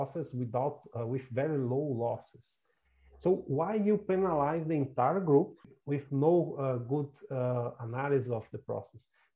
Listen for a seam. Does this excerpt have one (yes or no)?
yes